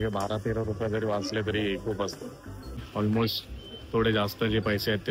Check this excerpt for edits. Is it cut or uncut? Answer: cut